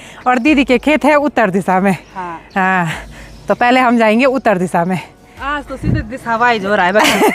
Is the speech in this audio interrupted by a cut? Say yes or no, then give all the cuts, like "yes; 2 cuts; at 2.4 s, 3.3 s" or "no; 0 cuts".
no; 0 cuts